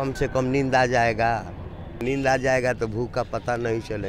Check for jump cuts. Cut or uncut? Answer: cut